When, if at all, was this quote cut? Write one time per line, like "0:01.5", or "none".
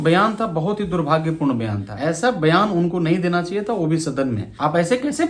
0:01.9
0:04.5